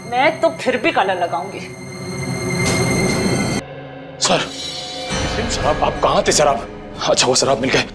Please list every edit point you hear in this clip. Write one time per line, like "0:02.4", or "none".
0:03.6